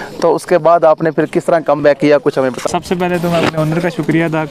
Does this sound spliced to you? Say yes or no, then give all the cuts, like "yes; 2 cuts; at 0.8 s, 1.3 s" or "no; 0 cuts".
no; 0 cuts